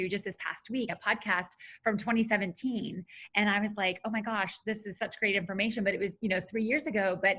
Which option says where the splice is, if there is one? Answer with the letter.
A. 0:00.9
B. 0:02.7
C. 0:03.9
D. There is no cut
A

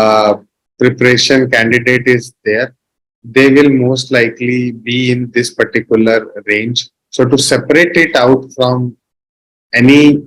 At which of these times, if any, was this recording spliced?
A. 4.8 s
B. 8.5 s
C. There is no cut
C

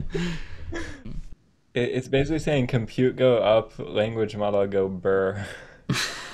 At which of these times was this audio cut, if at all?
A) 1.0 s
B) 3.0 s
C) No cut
A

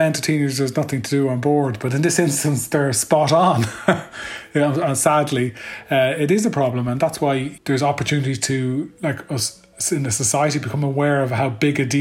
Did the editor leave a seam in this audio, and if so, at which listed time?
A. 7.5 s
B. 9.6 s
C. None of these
A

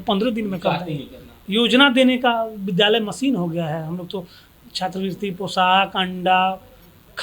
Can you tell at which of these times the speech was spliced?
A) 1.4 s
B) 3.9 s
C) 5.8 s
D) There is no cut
A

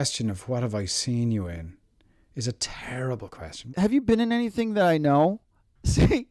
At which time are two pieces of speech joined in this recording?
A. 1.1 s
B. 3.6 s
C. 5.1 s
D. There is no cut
B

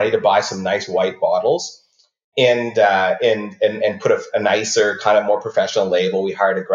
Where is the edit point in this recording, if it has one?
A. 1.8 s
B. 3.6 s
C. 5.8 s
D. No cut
D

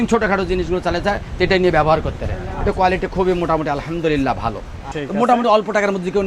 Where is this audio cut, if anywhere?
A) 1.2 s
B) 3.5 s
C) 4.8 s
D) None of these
C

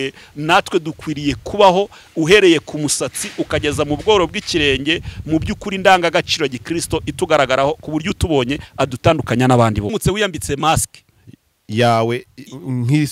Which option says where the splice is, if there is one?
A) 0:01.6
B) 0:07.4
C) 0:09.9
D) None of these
C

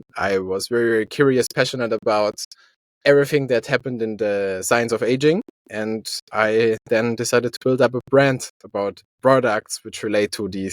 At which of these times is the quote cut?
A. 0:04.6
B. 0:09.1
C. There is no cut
C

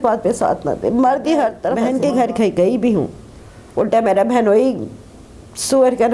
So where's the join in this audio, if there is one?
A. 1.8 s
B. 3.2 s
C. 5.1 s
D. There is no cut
A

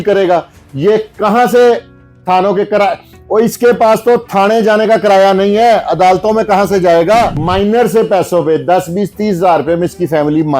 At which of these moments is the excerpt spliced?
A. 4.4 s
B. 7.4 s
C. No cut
B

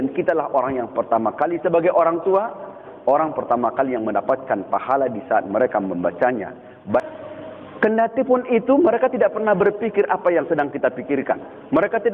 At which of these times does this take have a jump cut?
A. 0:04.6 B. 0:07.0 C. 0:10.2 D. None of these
B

